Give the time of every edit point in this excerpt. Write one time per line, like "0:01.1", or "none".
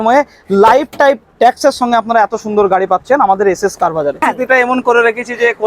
0:04.2